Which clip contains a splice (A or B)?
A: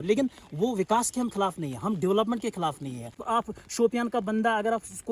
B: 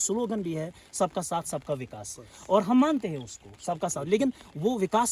A